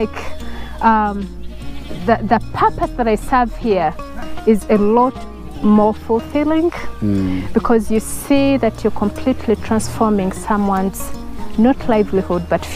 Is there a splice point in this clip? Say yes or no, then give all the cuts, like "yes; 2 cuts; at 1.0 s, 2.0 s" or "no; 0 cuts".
no; 0 cuts